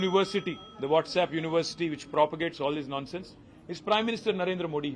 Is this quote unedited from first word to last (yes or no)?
yes